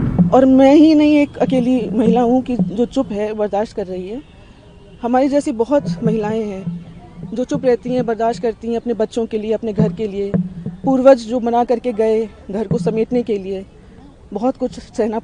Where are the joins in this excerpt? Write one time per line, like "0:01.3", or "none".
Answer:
none